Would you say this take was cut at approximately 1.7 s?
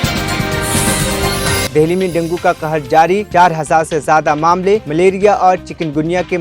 yes; 1 cut; at 1.7 s

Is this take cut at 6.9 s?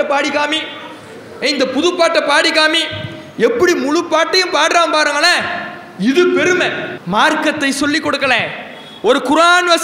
yes; 1 cut; at 6.9 s

